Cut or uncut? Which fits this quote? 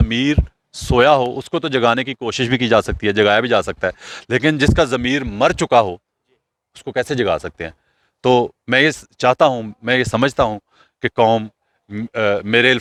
uncut